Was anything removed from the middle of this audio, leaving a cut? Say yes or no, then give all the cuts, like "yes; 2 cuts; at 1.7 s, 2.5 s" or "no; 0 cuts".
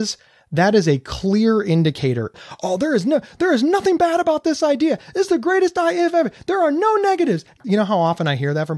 yes; 1 cut; at 7.5 s